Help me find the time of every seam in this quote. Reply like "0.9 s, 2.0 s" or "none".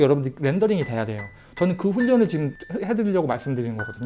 2.6 s